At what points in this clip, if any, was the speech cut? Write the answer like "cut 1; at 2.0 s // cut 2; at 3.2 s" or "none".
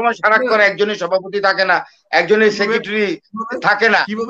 none

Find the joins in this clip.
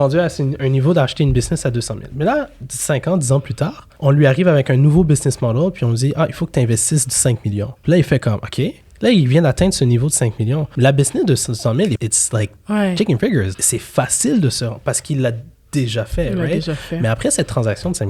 cut 1; at 7.7 s // cut 2; at 10.7 s // cut 3; at 12.0 s // cut 4; at 13.5 s

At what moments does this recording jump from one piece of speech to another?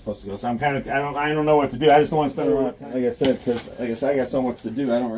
cut 1; at 2.8 s

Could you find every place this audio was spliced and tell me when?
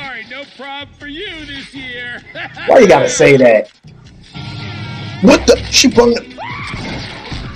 none

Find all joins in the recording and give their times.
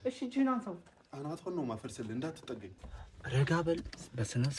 cut 1; at 2.7 s

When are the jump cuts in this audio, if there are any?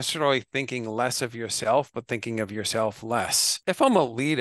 cut 1; at 3.5 s

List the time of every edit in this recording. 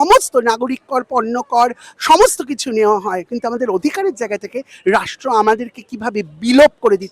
cut 1; at 3.3 s

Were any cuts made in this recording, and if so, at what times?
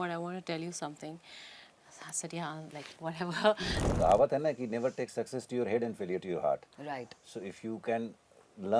cut 1; at 3.8 s

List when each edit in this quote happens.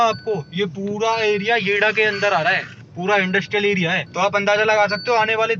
none

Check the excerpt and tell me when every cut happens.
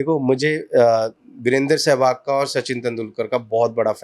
cut 1; at 1.2 s

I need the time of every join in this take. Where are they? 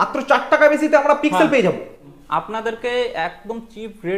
cut 1; at 2.1 s

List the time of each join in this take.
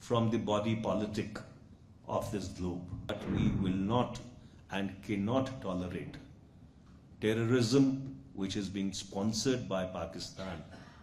cut 1; at 3.1 s

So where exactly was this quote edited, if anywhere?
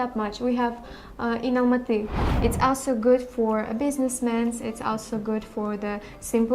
cut 1; at 2.2 s

